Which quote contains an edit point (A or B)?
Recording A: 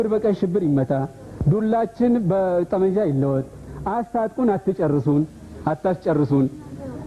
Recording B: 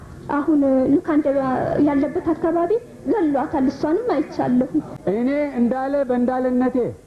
B